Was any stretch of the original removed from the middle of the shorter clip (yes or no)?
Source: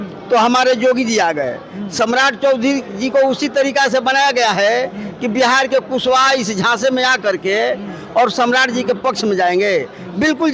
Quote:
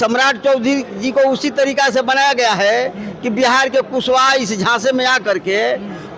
no